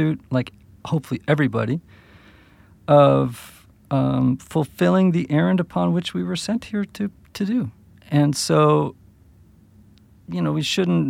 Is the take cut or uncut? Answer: uncut